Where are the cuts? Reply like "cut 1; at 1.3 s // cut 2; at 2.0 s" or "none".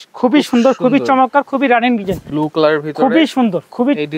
cut 1; at 2.2 s